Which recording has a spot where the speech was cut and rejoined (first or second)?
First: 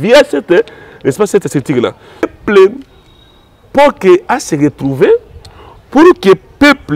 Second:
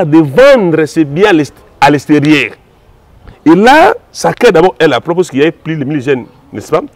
first